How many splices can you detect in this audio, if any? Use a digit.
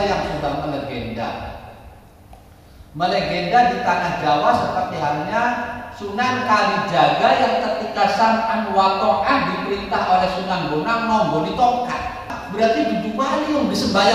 1